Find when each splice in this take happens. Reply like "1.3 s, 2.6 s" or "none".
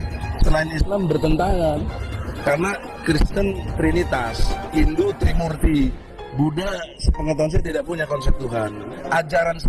none